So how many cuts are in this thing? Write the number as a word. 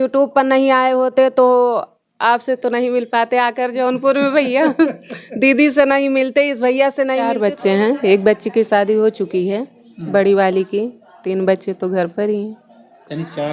one